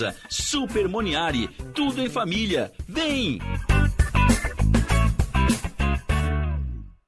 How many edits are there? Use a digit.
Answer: 0